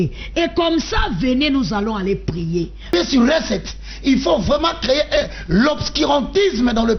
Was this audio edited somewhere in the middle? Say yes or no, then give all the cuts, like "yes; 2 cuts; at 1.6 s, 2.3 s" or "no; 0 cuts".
yes; 1 cut; at 2.9 s